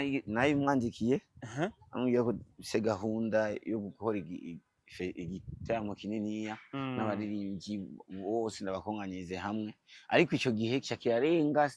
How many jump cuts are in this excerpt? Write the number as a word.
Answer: zero